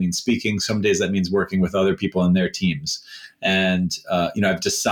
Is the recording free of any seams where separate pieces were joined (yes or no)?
yes